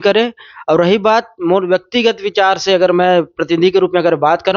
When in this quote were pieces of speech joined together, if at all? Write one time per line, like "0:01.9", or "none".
none